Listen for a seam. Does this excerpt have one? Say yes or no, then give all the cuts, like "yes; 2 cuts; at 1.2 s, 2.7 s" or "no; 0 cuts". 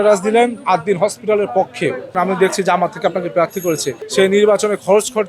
yes; 2 cuts; at 2.1 s, 4.0 s